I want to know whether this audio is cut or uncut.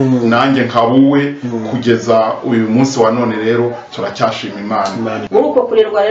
cut